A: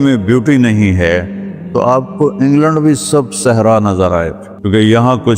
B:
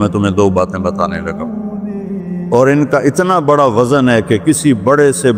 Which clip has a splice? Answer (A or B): A